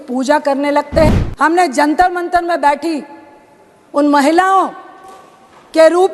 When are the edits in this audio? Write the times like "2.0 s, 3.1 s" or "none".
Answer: 1.1 s